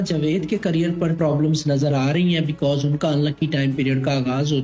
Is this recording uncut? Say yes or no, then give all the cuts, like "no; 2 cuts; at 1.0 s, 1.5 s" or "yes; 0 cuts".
no; 1 cut; at 1.1 s